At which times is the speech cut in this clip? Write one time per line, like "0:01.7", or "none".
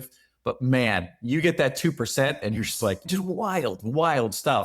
0:03.0